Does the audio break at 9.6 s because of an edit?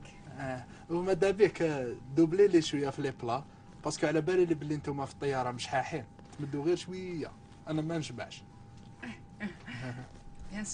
yes; 1 cut; at 9.6 s

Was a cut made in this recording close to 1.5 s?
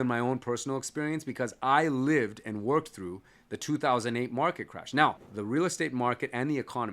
no; 1 cut; at 5.3 s

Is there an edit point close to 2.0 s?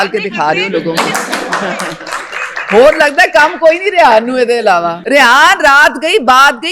no; 1 cut; at 5.0 s

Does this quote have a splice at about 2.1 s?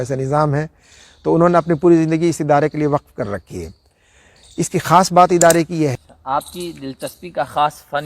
no; 1 cut; at 6.0 s

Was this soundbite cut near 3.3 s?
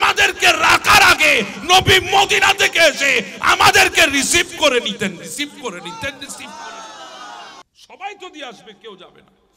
no; 1 cut; at 7.6 s

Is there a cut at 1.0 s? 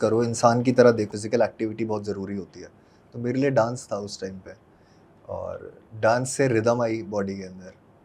yes; 1 cut; at 1.0 s

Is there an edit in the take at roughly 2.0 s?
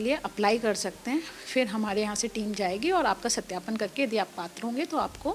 no; 0 cuts

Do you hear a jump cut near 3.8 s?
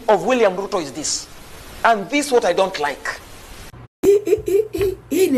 yes; 1 cut; at 3.8 s

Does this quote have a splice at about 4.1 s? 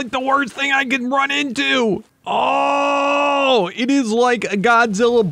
no; 1 cut; at 2.1 s

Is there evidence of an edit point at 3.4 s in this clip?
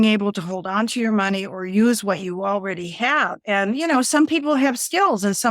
yes; 1 cut; at 3.4 s

